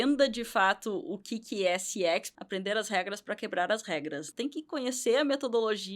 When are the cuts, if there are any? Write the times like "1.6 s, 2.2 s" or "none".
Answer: 2.3 s, 4.3 s